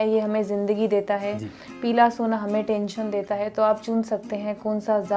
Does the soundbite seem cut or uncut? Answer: uncut